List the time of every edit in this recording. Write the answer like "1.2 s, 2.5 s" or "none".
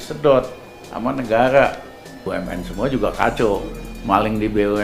2.3 s